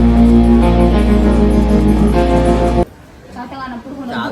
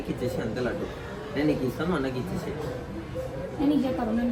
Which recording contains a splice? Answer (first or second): first